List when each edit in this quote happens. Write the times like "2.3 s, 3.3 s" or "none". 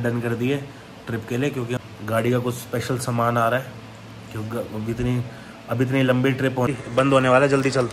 1.8 s, 6.7 s